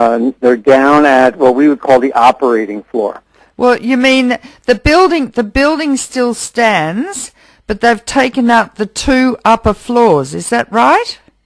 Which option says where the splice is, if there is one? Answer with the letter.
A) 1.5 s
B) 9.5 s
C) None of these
A